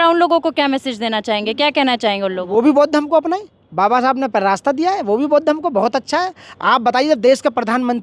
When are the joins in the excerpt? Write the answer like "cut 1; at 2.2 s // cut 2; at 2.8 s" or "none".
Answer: none